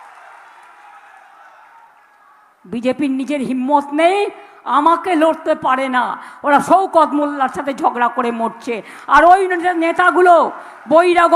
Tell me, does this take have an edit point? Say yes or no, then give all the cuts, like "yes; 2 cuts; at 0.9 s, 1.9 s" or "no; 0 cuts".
no; 0 cuts